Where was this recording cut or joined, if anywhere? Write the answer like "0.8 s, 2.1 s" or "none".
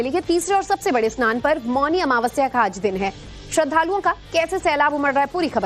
3.0 s